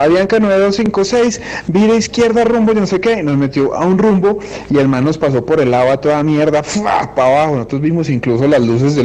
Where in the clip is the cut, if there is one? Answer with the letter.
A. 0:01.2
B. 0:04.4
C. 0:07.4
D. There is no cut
B